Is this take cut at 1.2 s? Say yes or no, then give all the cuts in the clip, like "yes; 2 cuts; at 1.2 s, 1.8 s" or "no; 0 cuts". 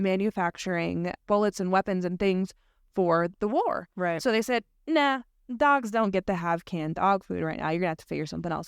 yes; 1 cut; at 1.2 s